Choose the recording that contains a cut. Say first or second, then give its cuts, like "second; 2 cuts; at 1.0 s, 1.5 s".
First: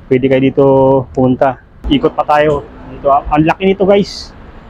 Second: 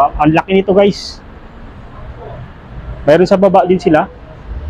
first; 1 cut; at 1.7 s